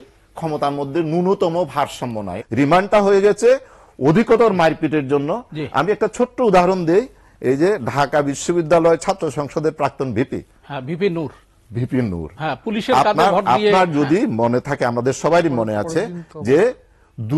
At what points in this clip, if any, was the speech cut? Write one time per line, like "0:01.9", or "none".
0:02.4

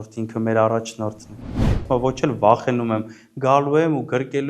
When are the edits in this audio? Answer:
0:01.8

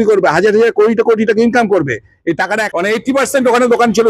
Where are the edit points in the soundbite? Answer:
0:02.6

